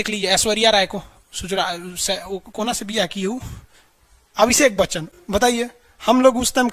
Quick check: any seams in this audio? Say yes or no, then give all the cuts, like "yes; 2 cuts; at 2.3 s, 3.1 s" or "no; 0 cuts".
no; 0 cuts